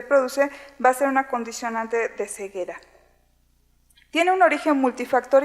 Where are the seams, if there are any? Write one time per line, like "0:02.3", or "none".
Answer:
0:04.3